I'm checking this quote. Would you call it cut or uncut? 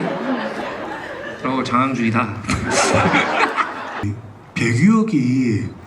cut